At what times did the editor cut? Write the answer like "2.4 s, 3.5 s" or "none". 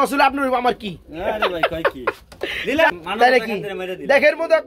2.9 s